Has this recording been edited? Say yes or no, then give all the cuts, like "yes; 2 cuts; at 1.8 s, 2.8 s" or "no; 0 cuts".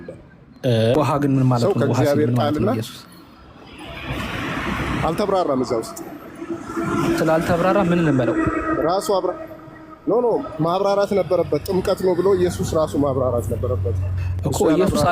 yes; 1 cut; at 1.0 s